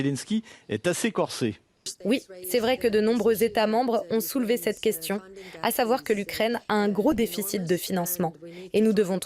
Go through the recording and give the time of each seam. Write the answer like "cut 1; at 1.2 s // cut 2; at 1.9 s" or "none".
cut 1; at 2.0 s